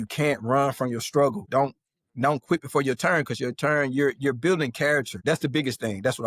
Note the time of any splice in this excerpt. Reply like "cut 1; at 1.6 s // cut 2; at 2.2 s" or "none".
cut 1; at 1.4 s // cut 2; at 5.1 s